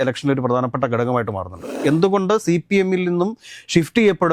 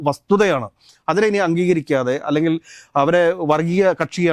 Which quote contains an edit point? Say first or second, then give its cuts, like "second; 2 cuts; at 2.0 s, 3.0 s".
first; 1 cut; at 1.6 s